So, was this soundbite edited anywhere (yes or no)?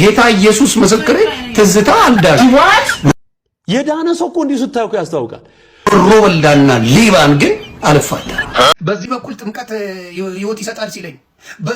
yes